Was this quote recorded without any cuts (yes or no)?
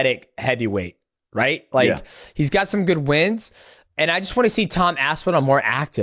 yes